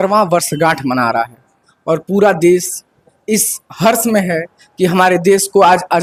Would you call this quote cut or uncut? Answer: uncut